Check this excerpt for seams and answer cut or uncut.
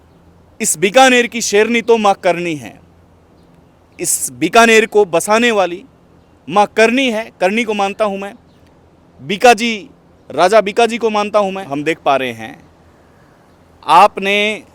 cut